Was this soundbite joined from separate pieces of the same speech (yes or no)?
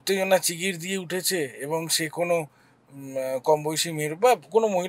no